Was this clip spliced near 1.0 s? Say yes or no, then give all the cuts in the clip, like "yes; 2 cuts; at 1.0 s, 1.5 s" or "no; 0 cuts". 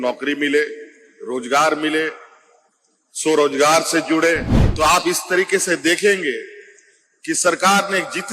no; 1 cut; at 4.6 s